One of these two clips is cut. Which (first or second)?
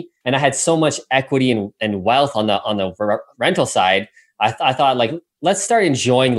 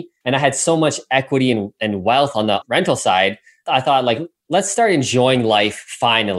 second